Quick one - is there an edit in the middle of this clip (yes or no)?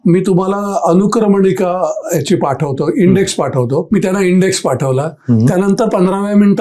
yes